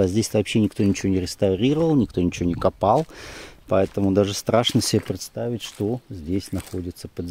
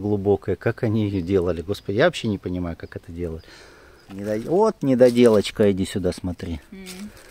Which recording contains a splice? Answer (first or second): second